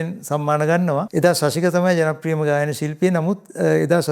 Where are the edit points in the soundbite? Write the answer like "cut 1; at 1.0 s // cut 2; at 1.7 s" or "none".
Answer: cut 1; at 1.1 s